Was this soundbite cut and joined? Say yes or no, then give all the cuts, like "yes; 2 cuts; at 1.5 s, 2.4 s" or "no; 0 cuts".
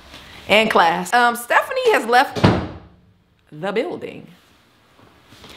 yes; 1 cut; at 1.0 s